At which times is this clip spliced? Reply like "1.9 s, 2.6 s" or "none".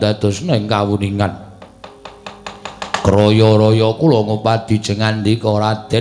none